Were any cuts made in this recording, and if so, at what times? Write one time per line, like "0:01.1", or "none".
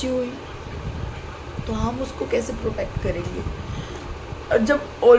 none